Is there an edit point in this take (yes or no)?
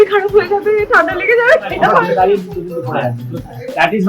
yes